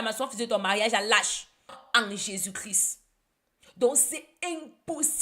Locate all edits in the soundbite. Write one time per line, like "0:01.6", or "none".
0:01.8